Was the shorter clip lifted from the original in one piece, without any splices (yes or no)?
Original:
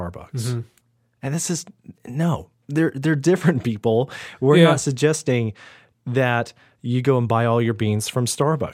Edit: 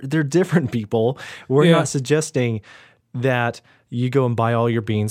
yes